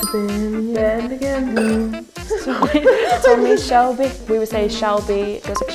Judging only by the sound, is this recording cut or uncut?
uncut